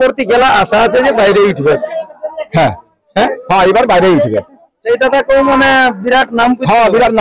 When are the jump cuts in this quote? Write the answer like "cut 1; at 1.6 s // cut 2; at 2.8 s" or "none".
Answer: cut 1; at 4.8 s